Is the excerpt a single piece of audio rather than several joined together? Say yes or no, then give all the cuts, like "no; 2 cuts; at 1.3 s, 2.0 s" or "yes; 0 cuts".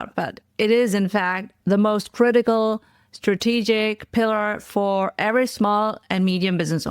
yes; 0 cuts